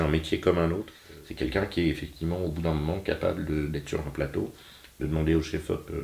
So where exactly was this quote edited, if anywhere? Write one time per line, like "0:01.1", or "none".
0:01.0